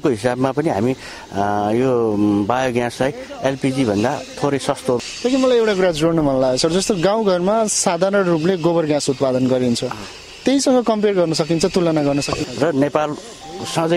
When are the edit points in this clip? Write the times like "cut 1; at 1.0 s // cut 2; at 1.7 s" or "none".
cut 1; at 5.0 s // cut 2; at 12.4 s